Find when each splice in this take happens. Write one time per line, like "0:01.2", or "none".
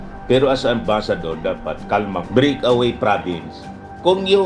0:02.2